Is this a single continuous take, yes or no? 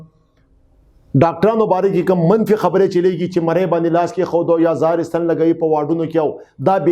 yes